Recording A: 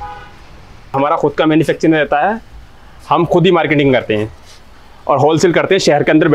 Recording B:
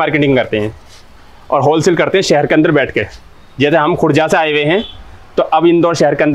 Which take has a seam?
A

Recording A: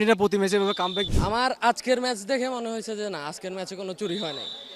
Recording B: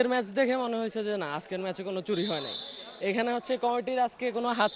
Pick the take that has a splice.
A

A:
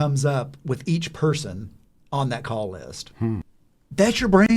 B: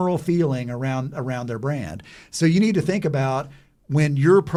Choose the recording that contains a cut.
A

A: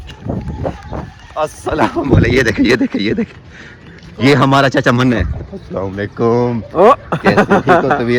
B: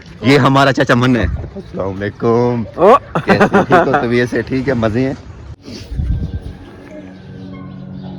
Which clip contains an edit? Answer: B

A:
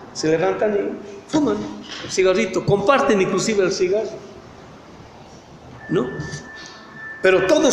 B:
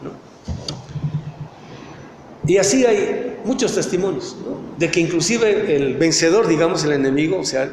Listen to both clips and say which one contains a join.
B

